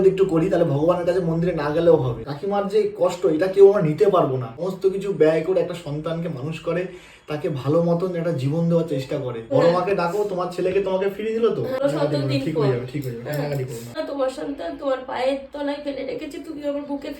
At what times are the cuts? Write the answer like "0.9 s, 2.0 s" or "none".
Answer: 2.3 s, 4.5 s, 9.4 s, 11.8 s, 13.9 s